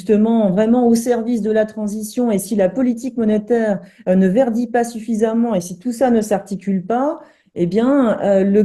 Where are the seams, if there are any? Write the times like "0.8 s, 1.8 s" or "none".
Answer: none